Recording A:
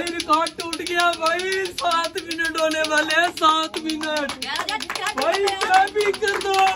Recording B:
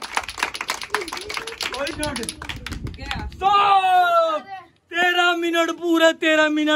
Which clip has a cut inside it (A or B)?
B